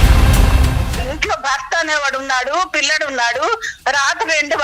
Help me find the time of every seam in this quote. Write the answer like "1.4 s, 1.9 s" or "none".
0.9 s